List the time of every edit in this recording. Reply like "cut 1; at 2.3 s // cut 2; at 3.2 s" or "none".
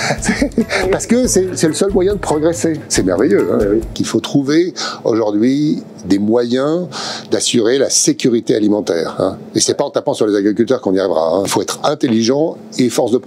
cut 1; at 2.8 s // cut 2; at 4.0 s // cut 3; at 9.4 s // cut 4; at 11.5 s